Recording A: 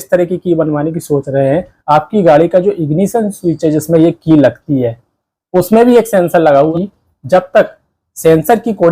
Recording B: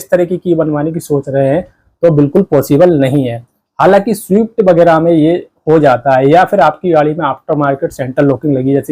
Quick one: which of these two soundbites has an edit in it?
A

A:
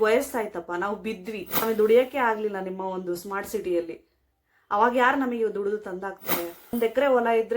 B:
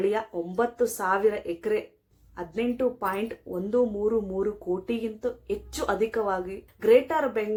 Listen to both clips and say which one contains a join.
A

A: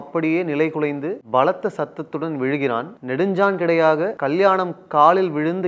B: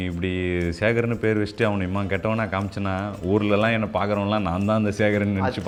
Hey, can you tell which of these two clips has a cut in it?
A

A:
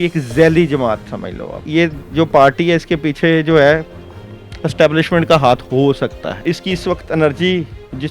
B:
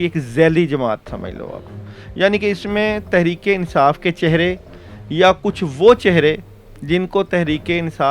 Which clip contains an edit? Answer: A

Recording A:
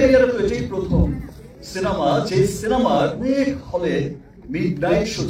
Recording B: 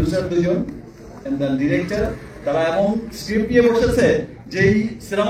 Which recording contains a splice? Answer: A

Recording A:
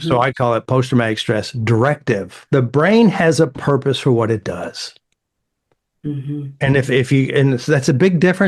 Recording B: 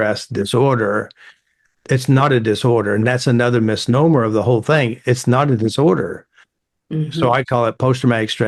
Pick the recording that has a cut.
A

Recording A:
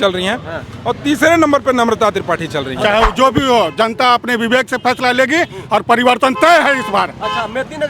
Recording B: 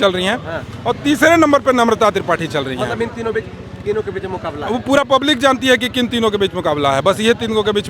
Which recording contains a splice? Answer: A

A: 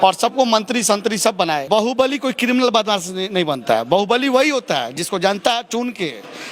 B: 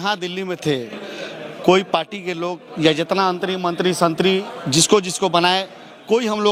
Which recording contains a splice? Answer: A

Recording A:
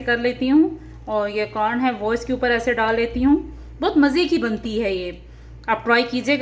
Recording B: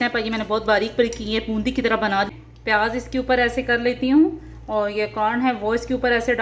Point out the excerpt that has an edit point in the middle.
B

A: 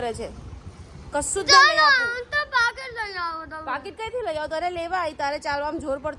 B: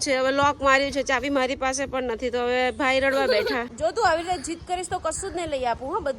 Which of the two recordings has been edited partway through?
B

